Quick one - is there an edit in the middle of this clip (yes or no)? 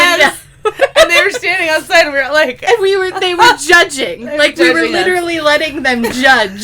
no